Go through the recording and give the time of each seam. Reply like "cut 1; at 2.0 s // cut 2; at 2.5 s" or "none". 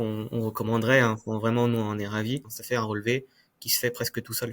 cut 1; at 2.5 s